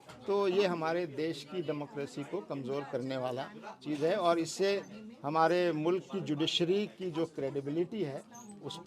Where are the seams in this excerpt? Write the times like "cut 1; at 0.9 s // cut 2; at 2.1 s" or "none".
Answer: none